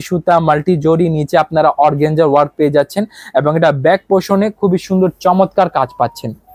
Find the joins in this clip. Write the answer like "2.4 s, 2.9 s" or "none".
none